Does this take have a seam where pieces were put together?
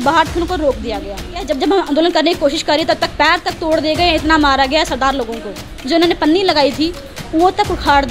yes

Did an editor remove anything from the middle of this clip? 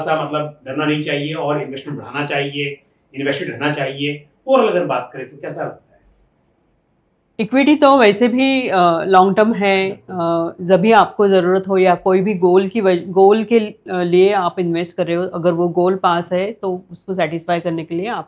no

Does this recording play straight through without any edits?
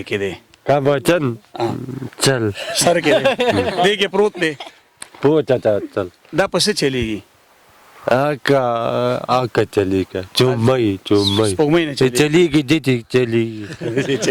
yes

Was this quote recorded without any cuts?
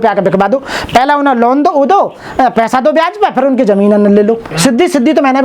no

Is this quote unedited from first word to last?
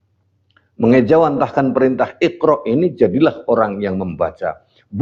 yes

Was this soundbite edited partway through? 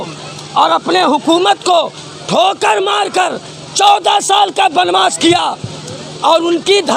no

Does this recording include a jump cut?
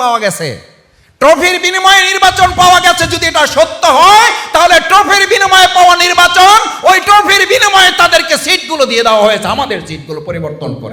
no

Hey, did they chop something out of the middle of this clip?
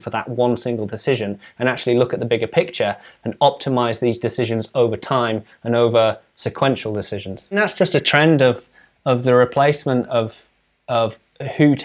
yes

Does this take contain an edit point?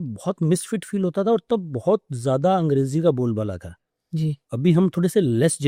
no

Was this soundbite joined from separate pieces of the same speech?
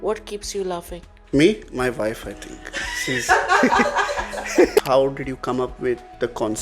yes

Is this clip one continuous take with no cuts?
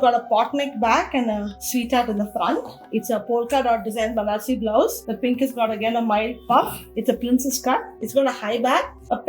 no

